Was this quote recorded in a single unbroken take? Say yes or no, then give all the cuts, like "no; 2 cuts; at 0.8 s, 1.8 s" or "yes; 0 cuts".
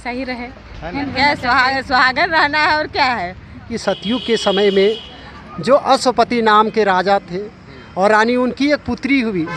no; 2 cuts; at 1.1 s, 3.7 s